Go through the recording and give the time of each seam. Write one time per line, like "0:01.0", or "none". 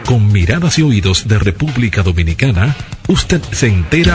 none